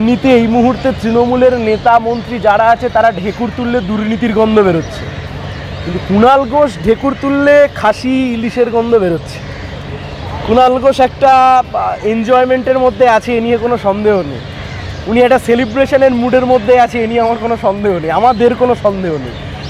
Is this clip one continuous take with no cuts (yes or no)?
yes